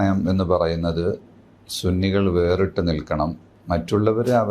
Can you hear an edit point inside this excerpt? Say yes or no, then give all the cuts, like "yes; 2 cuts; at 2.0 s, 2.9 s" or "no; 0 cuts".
yes; 1 cut; at 3.5 s